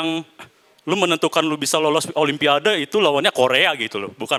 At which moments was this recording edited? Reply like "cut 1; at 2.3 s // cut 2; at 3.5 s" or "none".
none